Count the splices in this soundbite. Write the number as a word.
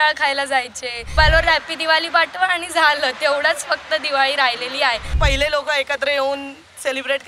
two